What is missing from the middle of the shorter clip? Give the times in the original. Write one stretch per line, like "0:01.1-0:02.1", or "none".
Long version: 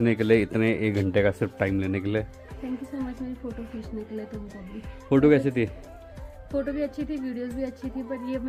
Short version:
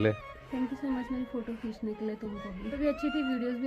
0:04.8-0:06.7